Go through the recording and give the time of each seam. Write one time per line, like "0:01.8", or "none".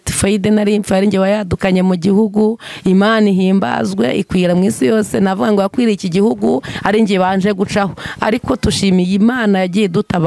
none